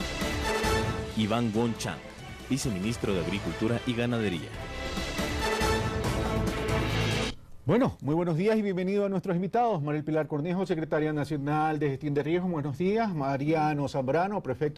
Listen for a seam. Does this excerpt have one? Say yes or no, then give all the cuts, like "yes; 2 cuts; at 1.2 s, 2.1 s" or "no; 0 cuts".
yes; 1 cut; at 0.9 s